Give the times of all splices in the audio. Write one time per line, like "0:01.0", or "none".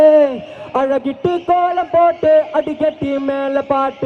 none